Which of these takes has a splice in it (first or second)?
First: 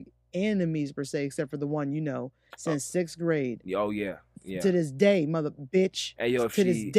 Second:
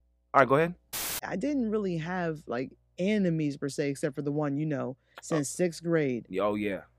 second